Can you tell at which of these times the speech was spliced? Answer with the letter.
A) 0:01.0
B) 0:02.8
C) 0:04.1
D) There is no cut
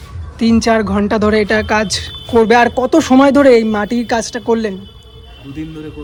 D